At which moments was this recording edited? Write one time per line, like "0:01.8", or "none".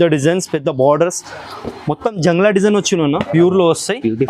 0:03.3